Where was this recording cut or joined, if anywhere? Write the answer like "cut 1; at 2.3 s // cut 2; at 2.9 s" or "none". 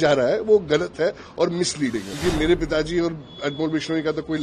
cut 1; at 2.1 s